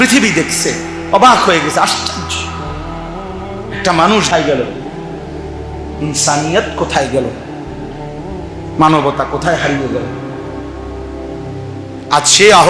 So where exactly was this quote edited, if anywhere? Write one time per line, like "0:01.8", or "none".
0:04.7
0:06.0
0:07.4
0:08.8
0:10.0
0:11.9